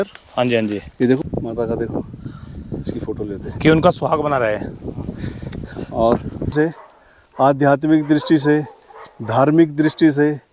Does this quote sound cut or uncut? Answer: cut